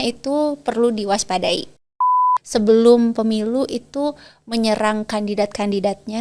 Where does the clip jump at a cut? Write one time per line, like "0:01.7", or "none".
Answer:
0:02.3